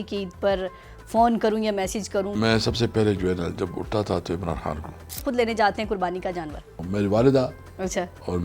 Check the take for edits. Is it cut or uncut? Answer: cut